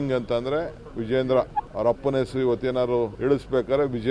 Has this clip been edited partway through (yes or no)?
yes